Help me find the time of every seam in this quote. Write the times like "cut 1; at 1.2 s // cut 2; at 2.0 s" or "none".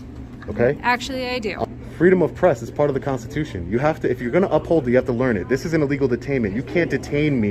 cut 1; at 1.6 s